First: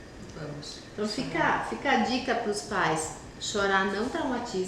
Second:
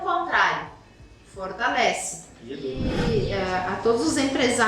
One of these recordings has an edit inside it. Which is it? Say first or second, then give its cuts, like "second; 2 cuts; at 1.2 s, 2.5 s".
second; 1 cut; at 3.0 s